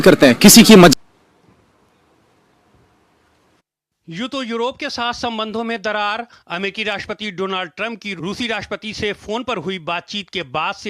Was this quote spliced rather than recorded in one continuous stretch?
yes; 1 cut; at 0.9 s

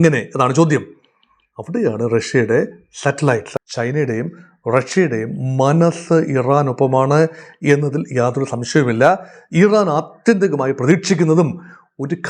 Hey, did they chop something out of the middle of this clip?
yes; 1 cut; at 3.5 s

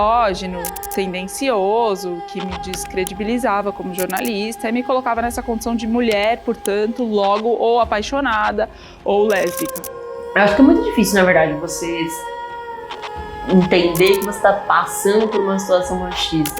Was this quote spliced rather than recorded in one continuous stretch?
yes; 1 cut; at 10.1 s

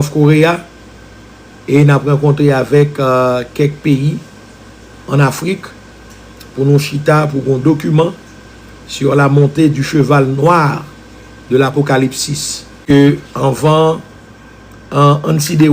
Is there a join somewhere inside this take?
yes; 1 cut; at 12.8 s

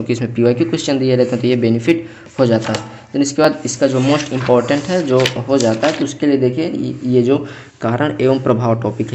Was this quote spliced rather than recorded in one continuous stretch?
no; 0 cuts

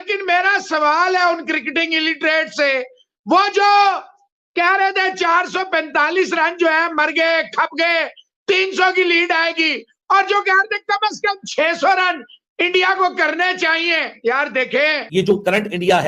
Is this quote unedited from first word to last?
no; 1 cut; at 15.0 s

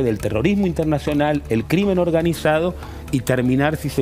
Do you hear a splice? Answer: no; 0 cuts

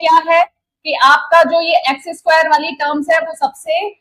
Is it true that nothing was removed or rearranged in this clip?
yes; 0 cuts

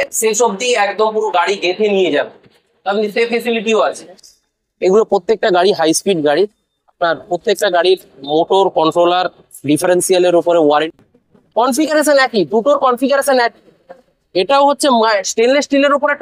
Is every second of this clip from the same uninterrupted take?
no; 2 cuts; at 4.3 s, 10.9 s

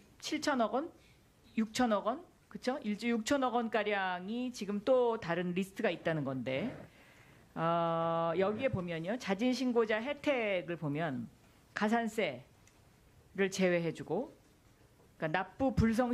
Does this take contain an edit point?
no; 0 cuts

